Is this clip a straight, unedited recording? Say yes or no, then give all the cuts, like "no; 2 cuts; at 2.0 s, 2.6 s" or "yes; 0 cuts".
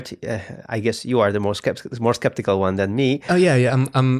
no; 1 cut; at 3.2 s